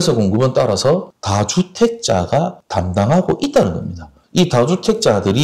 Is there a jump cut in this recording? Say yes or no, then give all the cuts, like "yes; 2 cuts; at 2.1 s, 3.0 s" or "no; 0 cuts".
no; 0 cuts